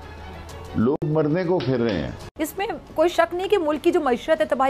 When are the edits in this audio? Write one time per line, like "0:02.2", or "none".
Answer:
0:02.2

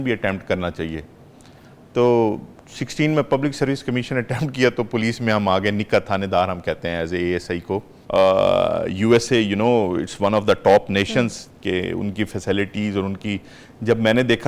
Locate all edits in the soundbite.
0:07.9

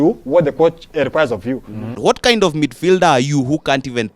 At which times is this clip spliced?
0:01.8

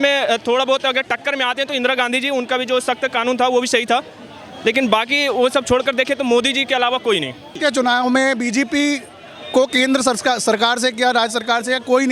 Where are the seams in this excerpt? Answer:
0:07.5

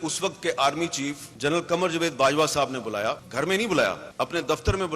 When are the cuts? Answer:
0:01.3
0:03.2
0:04.0

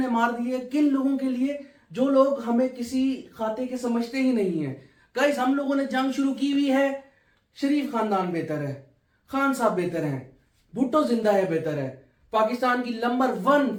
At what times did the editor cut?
none

